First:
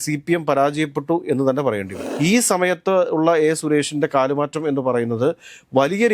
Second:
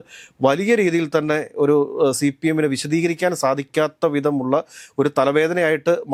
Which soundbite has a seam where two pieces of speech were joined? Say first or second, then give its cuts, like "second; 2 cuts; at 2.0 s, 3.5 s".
first; 1 cut; at 2.0 s